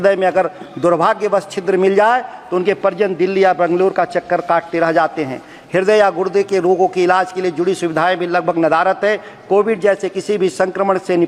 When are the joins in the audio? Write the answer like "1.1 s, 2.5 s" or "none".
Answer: none